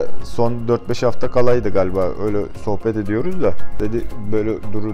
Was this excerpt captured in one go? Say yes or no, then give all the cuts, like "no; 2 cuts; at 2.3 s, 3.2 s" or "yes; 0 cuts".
no; 1 cut; at 3.7 s